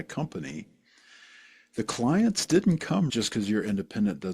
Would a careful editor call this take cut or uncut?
cut